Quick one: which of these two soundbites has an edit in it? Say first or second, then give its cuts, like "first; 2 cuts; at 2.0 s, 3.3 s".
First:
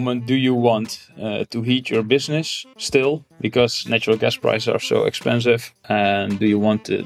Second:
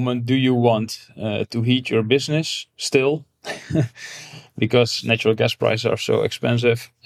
first; 2 cuts; at 3.3 s, 5.7 s